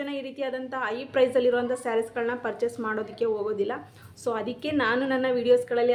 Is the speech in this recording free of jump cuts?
yes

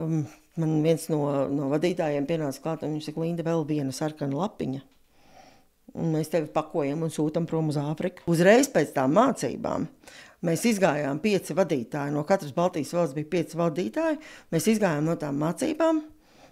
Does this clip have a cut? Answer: yes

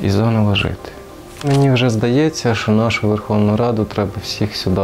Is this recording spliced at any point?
yes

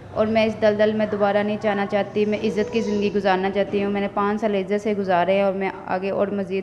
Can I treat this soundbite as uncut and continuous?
yes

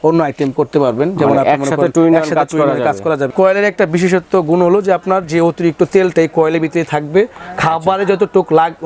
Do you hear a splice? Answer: yes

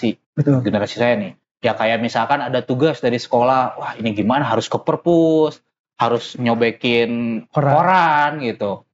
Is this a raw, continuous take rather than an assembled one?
yes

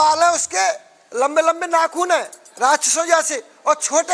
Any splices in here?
no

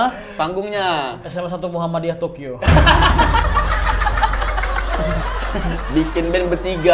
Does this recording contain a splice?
no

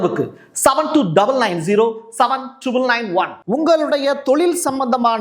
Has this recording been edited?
yes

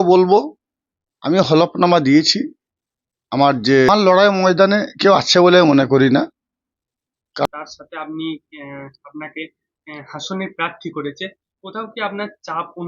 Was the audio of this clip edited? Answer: yes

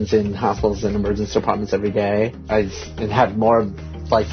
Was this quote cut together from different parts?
yes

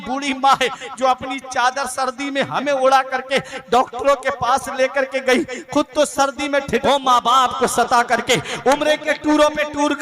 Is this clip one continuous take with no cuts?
no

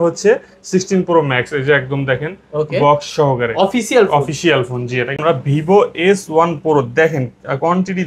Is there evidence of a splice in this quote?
yes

